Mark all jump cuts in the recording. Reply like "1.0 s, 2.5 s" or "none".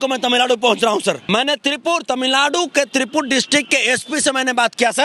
1.2 s